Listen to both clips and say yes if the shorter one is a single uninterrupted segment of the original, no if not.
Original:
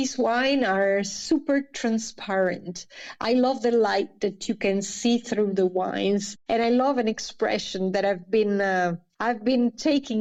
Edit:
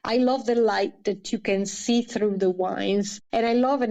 yes